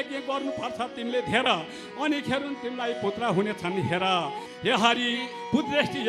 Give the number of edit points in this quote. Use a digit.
1